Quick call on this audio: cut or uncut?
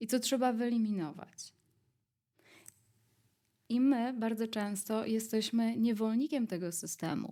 uncut